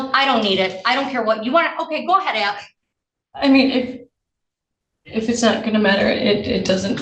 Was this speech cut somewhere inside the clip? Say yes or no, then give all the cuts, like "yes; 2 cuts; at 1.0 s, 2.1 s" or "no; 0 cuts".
yes; 1 cut; at 2.7 s